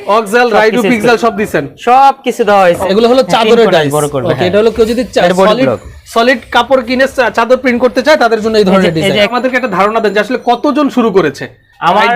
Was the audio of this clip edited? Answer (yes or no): yes